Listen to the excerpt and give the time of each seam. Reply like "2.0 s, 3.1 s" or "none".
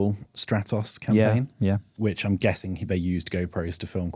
2.0 s